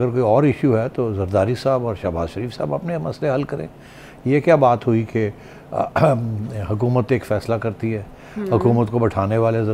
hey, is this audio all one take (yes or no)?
yes